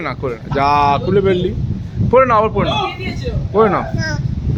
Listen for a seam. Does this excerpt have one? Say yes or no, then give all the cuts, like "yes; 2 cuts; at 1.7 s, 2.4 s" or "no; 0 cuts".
no; 0 cuts